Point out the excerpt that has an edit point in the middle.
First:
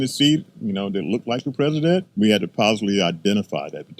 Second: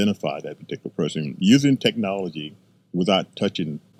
first; 1 cut; at 2.1 s

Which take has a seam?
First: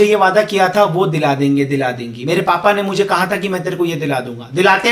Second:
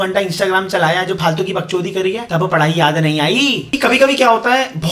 second; 2 cuts; at 2.2 s, 3.7 s

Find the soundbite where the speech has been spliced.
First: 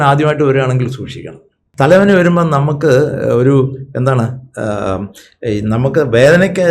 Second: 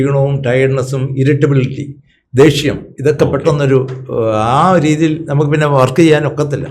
first; 1 cut; at 1.6 s

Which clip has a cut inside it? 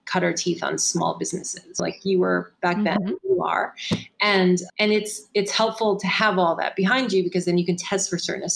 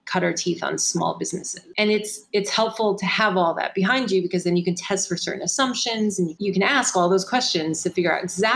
second; 2 cuts; at 1.7 s, 6.3 s

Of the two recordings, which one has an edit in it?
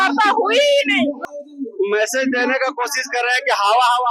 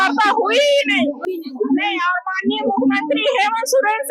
first; 1 cut; at 1.2 s

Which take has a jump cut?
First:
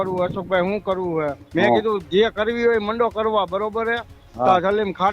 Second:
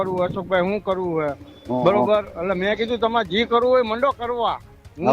first; 1 cut; at 1.4 s

